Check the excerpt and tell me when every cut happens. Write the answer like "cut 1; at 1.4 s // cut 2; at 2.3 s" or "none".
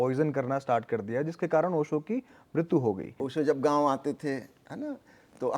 cut 1; at 3.2 s